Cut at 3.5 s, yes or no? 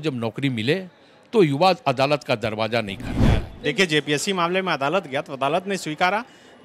yes